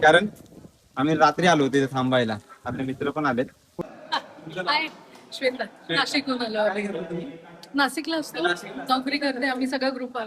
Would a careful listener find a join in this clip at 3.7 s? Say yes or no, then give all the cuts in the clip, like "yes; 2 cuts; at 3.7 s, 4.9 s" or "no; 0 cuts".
yes; 1 cut; at 3.7 s